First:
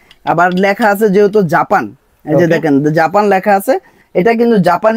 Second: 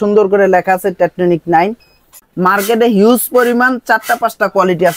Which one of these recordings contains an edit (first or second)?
second